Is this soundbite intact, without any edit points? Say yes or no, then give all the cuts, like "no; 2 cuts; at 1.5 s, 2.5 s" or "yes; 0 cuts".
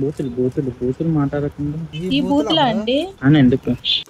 yes; 0 cuts